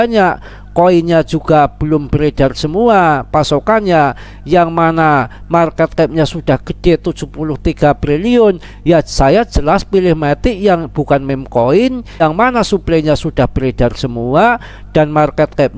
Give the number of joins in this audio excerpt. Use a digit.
1